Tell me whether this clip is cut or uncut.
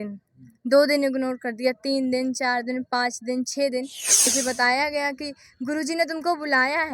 cut